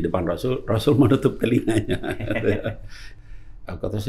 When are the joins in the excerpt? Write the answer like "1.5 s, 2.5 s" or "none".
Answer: 3.1 s